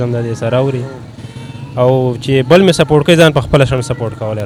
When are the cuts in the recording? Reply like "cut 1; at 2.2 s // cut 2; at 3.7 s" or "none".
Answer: none